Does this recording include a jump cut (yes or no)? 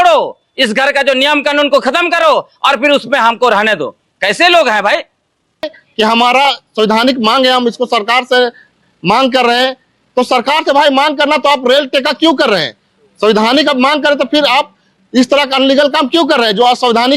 yes